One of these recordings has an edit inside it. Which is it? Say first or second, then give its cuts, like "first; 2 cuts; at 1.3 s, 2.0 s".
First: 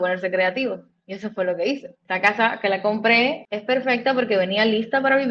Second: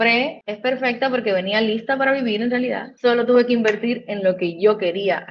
first; 1 cut; at 2.0 s